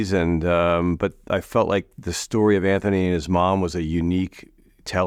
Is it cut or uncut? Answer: uncut